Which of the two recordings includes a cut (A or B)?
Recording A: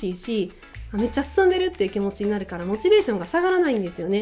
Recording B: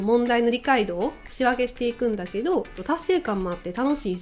B